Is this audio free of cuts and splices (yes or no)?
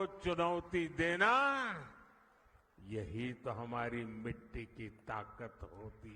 yes